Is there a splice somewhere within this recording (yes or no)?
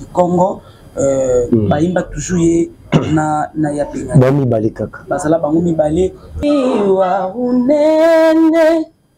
yes